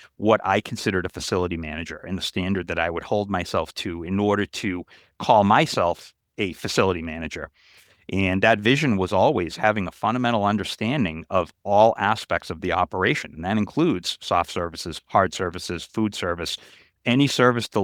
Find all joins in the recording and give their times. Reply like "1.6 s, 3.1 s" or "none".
none